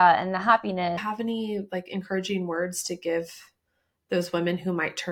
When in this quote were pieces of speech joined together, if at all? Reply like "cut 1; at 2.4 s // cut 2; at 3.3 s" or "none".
cut 1; at 1.0 s